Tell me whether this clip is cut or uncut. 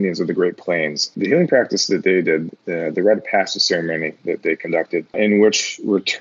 cut